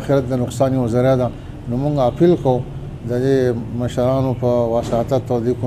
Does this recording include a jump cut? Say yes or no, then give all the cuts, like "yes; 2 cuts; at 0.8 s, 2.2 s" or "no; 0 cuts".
no; 0 cuts